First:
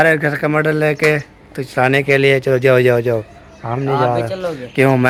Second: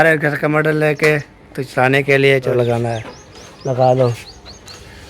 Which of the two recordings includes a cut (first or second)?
second